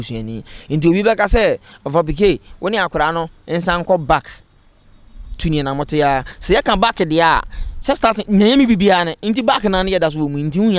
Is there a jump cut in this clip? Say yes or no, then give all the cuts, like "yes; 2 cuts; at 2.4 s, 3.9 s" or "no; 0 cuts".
no; 0 cuts